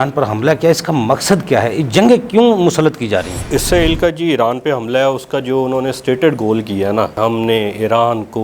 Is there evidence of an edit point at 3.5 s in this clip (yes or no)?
yes